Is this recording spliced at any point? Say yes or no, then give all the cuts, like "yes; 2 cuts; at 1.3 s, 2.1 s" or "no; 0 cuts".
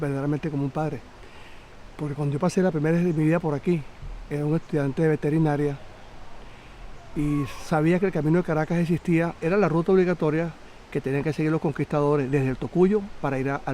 yes; 1 cut; at 8.1 s